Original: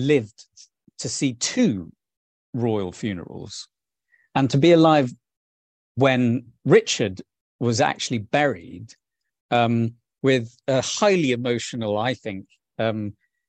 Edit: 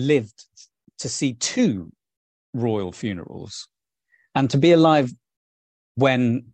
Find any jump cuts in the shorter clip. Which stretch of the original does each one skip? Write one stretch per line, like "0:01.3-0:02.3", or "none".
none

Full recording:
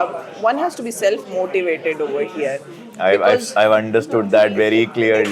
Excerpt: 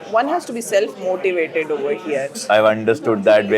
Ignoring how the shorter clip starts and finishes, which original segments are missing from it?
0:02.7-0:03.5

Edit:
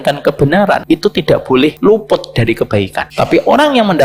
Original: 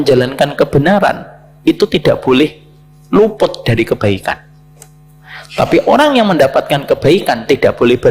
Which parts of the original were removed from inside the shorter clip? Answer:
0:01.2-0:01.6
0:02.5-0:03.1
0:04.3-0:05.4

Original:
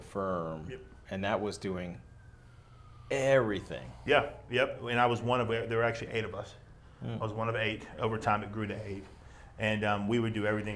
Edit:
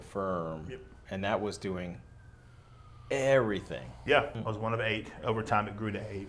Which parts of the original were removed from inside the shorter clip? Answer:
0:04.4-0:07.1

